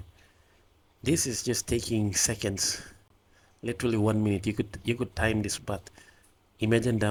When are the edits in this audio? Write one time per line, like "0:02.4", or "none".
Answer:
none